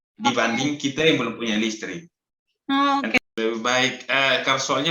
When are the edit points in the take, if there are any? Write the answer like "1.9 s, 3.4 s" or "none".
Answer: 3.2 s